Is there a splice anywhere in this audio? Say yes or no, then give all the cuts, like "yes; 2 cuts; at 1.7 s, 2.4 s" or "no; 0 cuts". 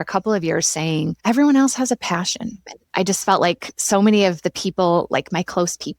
yes; 1 cut; at 2.6 s